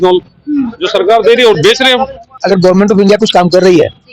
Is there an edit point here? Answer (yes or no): yes